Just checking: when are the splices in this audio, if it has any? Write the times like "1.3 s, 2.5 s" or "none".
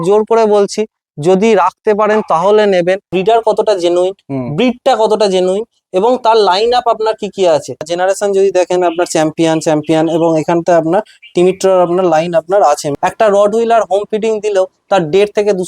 3.1 s, 7.9 s, 12.9 s